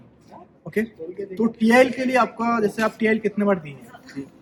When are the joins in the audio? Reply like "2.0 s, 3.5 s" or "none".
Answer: none